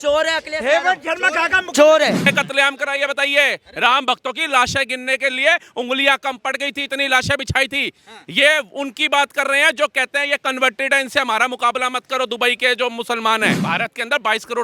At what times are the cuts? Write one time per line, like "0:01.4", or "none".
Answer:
0:02.3
0:13.6